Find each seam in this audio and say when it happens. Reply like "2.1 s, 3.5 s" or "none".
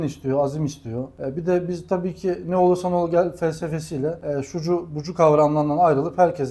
1.1 s, 4.2 s